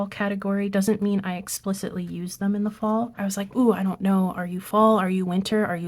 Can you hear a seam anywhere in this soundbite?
yes; 1 cut; at 3.2 s

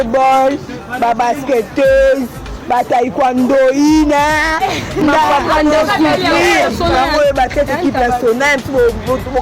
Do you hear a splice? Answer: yes; 1 cut; at 6.6 s

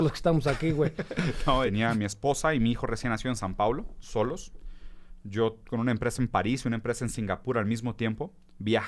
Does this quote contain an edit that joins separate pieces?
yes; 1 cut; at 1.7 s

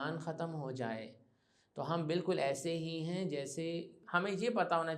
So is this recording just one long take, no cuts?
no; 1 cut; at 4.0 s

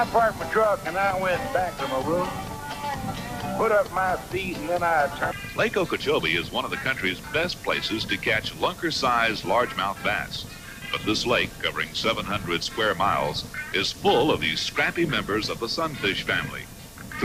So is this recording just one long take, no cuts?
yes; 0 cuts

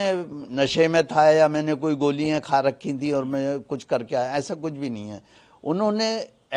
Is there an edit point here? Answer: no; 0 cuts

